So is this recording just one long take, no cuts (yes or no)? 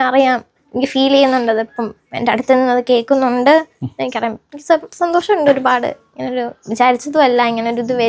yes